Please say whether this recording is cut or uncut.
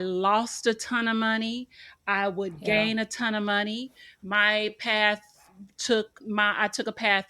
uncut